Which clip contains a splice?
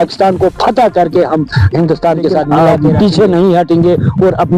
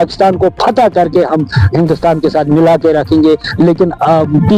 first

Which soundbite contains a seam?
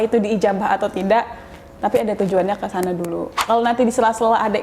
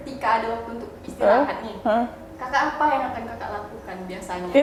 first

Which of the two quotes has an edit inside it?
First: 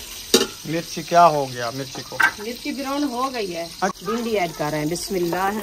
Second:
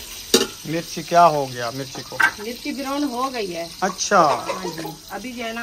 first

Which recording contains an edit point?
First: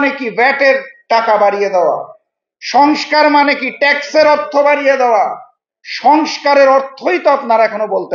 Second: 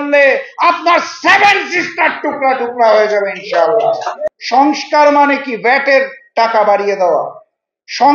second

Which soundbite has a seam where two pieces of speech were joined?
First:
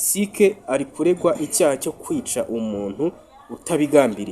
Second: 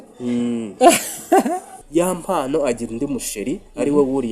second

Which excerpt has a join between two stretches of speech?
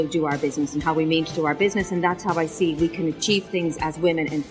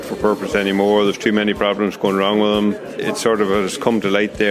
second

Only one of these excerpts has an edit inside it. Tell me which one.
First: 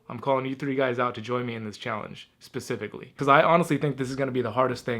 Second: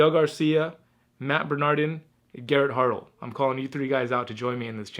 first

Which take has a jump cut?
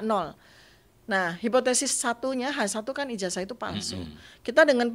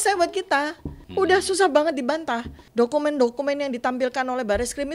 second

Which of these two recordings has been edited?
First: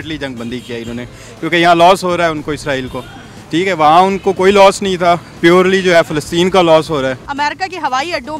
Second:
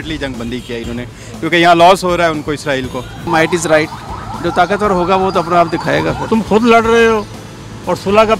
second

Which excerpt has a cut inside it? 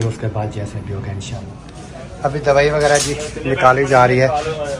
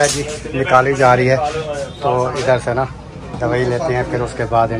first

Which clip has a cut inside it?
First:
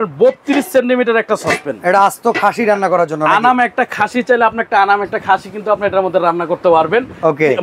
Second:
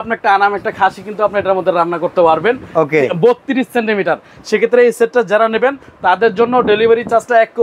second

